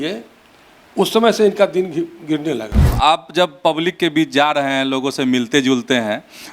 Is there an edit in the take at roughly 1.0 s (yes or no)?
no